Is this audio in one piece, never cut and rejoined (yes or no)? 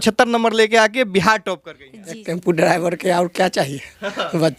no